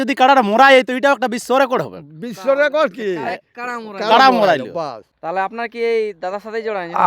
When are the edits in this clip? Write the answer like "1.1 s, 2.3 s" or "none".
5.1 s